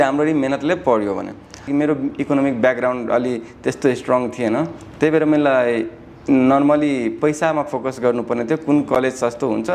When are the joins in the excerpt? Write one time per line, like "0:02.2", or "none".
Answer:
0:01.6